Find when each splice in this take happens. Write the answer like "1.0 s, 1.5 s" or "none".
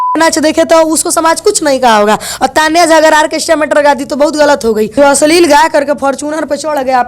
4.9 s

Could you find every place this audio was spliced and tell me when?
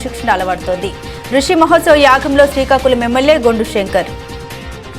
none

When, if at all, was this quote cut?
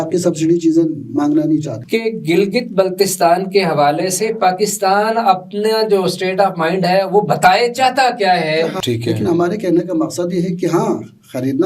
1.8 s, 8.8 s

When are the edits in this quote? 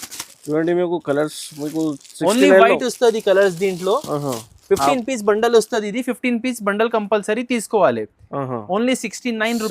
none

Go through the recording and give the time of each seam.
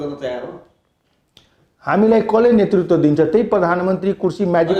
none

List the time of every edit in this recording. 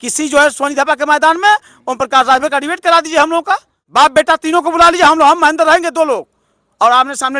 3.8 s

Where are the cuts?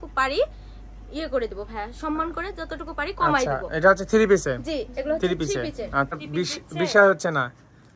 6.2 s

